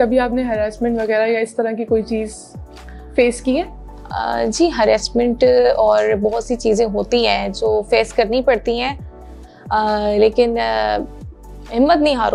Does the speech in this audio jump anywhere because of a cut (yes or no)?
no